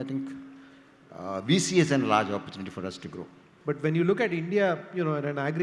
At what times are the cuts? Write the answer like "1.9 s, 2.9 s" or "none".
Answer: 3.5 s